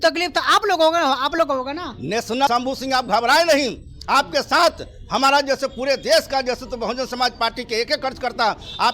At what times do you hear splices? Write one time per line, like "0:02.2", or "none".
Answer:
0:02.4